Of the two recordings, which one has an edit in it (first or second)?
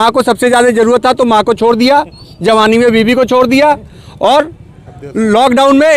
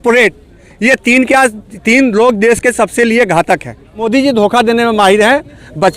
second